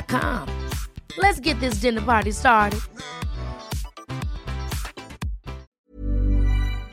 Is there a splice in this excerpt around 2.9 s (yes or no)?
no